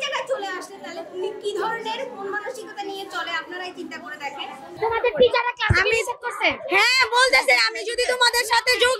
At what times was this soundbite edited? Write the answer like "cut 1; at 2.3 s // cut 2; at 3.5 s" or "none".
cut 1; at 4.7 s